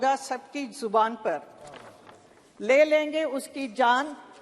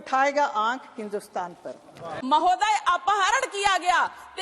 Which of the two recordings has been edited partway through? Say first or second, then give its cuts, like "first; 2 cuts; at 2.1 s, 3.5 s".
second; 1 cut; at 2.1 s